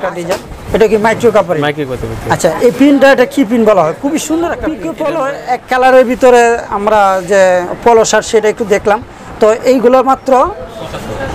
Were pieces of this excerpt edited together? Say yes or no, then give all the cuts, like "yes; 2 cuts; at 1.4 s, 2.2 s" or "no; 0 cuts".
yes; 1 cut; at 4.9 s